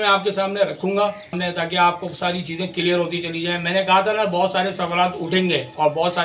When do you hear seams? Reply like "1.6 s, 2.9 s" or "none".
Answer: none